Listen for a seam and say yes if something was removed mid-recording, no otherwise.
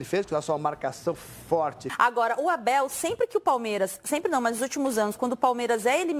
yes